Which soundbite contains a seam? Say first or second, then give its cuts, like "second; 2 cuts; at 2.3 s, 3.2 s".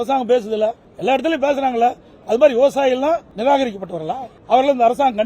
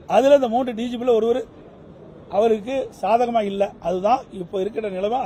first; 3 cuts; at 0.9 s, 3.3 s, 4.3 s